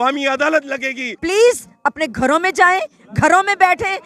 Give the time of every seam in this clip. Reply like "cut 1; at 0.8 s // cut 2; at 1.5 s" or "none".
cut 1; at 1.2 s